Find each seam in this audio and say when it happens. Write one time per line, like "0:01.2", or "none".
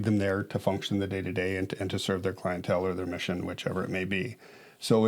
none